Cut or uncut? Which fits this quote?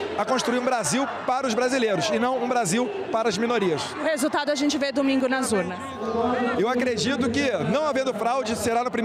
uncut